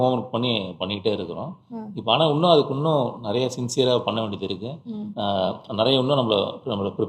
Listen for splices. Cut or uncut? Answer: uncut